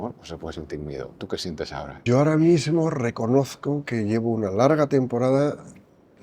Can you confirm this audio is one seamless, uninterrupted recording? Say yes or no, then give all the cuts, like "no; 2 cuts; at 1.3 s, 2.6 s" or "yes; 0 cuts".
no; 1 cut; at 1.9 s